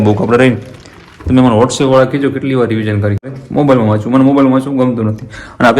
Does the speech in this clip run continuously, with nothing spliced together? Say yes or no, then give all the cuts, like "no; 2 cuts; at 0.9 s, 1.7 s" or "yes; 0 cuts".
no; 1 cut; at 3.3 s